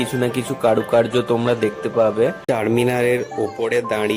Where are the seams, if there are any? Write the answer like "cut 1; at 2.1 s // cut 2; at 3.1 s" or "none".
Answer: cut 1; at 2.4 s

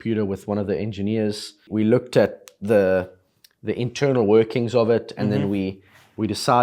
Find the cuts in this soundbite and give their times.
cut 1; at 1.7 s

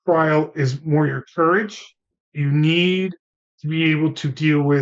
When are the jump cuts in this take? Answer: none

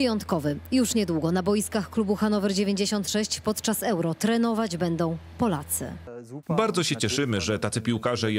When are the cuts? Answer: cut 1; at 6.1 s

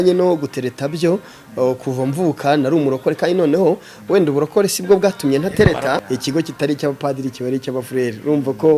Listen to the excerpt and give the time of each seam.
cut 1; at 6.0 s

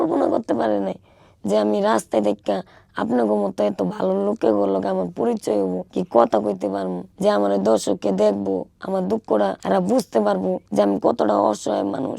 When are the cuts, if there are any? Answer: none

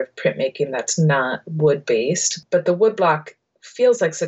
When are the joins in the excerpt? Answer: cut 1; at 2.4 s

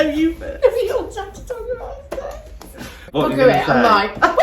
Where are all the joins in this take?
cut 1; at 3.1 s

